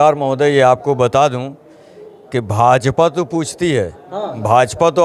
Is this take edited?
no; 0 cuts

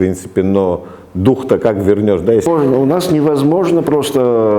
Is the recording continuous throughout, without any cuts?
no; 1 cut; at 2.5 s

